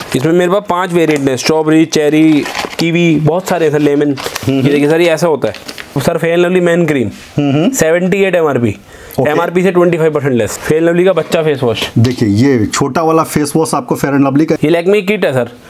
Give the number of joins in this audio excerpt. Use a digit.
3